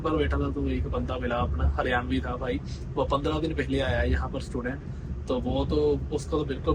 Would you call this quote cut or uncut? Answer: uncut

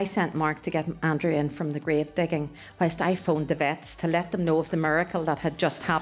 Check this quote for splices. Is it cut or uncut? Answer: cut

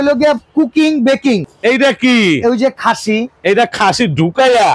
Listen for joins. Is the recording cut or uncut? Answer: cut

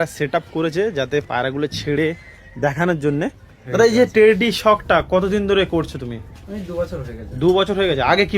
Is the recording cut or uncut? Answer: cut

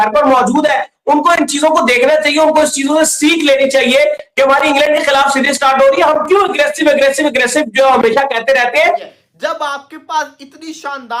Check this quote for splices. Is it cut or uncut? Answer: cut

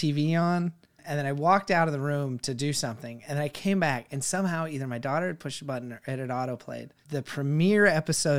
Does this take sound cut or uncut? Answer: cut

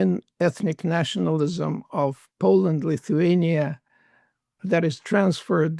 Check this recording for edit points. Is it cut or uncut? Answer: uncut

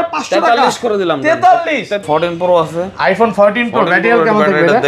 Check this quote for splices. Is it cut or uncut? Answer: cut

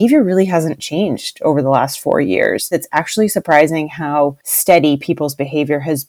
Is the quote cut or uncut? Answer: cut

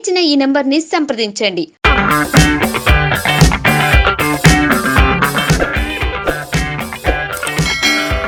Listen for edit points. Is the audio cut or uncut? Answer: uncut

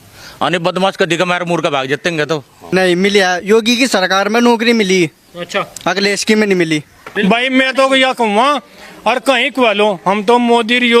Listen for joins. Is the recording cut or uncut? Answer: cut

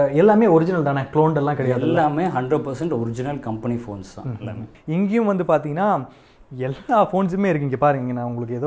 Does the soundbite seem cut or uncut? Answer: cut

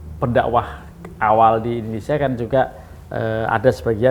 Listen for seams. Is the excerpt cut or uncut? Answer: uncut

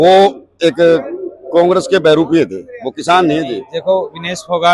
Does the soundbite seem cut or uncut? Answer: cut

